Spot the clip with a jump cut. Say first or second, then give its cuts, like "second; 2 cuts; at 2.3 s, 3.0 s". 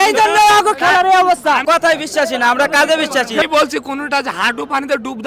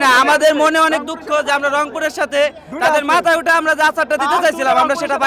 first; 2 cuts; at 1.6 s, 3.4 s